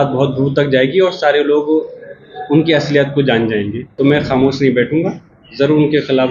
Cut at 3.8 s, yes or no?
yes